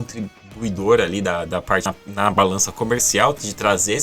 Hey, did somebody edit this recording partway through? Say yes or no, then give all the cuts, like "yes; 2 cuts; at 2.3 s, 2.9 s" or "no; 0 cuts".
yes; 1 cut; at 2.0 s